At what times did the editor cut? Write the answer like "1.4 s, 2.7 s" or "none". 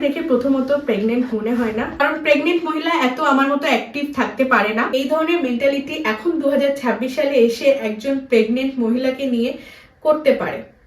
2.0 s, 4.9 s